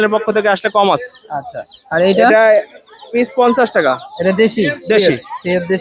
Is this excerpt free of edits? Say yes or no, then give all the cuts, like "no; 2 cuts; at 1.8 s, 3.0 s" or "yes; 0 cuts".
yes; 0 cuts